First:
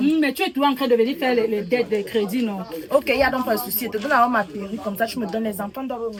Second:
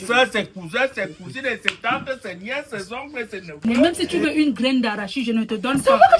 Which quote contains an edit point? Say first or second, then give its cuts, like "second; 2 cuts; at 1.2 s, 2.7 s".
second; 1 cut; at 3.6 s